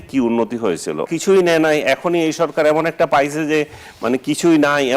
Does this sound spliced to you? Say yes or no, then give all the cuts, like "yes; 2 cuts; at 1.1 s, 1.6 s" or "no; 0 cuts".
yes; 1 cut; at 1.1 s